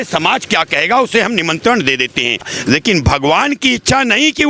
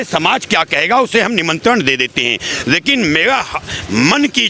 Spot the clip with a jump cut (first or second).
first